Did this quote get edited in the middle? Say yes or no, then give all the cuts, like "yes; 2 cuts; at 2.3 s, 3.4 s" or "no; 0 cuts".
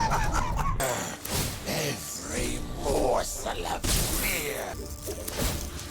yes; 2 cuts; at 0.8 s, 4.8 s